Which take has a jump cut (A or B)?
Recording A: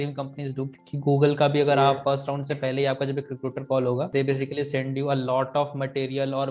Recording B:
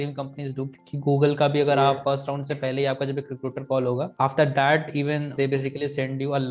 A